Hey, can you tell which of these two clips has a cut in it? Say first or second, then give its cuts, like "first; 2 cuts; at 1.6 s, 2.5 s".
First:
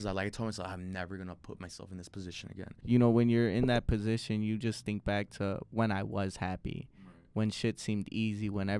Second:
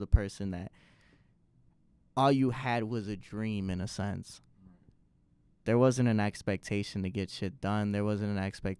first; 1 cut; at 2.7 s